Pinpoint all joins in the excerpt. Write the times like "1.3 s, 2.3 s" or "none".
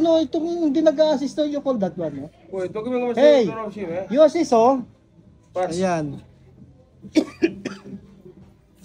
none